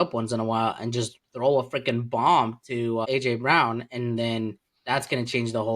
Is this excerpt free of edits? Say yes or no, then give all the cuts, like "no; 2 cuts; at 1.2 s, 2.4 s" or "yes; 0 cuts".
no; 1 cut; at 3.1 s